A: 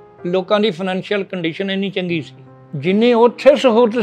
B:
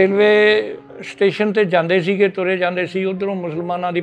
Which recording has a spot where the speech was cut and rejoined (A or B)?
A